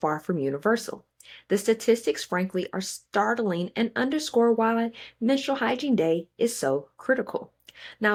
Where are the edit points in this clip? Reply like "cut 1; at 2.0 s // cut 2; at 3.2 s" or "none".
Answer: none

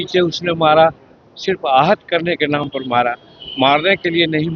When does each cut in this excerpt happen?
none

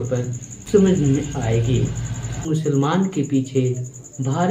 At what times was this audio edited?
cut 1; at 2.4 s

